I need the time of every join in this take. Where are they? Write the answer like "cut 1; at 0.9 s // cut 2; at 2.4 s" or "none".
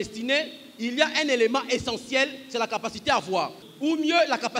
cut 1; at 3.6 s